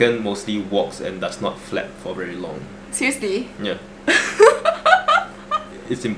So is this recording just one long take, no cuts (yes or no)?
yes